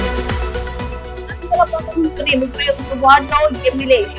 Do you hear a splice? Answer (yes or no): no